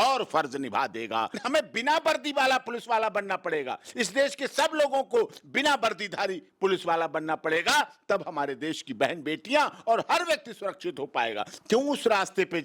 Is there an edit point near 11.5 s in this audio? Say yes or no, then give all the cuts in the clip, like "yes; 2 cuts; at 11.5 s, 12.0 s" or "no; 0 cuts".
yes; 2 cuts; at 1.4 s, 11.5 s